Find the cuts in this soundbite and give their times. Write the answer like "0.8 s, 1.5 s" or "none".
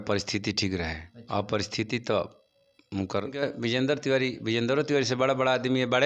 3.4 s